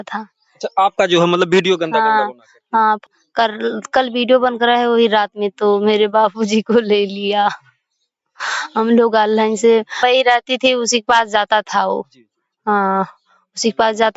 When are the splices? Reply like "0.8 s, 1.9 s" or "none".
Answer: 3.0 s, 10.0 s